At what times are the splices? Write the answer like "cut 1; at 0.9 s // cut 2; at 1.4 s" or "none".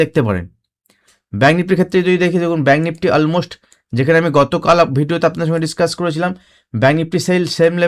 none